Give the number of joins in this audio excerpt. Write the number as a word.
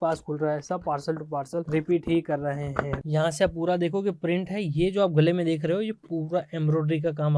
two